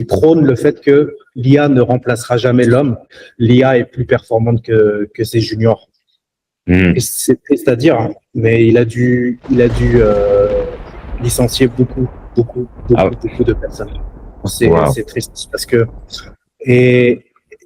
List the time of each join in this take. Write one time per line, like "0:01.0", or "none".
0:02.9